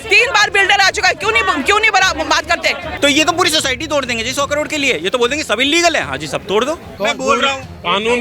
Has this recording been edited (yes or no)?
yes